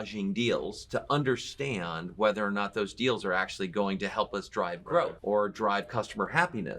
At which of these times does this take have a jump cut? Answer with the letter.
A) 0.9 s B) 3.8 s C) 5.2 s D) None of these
C